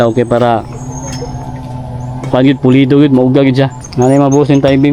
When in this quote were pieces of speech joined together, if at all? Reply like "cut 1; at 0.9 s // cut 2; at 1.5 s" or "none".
cut 1; at 3.8 s